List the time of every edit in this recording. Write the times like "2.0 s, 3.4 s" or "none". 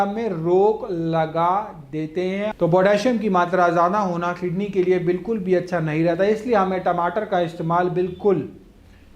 2.5 s